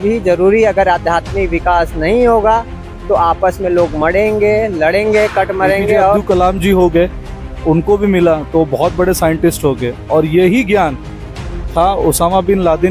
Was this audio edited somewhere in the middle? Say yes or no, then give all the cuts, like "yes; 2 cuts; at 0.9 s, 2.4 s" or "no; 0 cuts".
yes; 1 cut; at 6.2 s